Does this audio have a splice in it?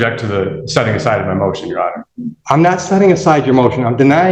no; 0 cuts

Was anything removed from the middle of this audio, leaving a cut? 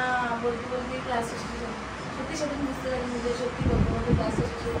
no; 0 cuts

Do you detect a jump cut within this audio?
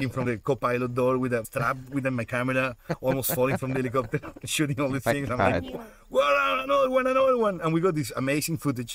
no; 0 cuts

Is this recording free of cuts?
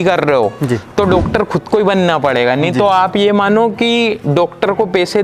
yes; 0 cuts

